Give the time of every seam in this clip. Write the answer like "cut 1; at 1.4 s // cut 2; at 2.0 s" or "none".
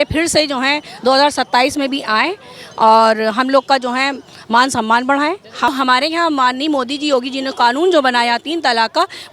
cut 1; at 5.7 s